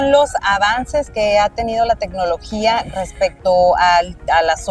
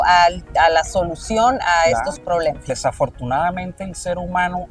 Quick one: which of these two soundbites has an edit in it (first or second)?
second